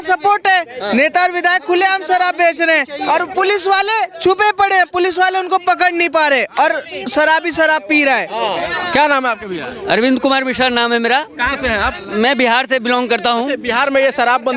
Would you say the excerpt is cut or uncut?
uncut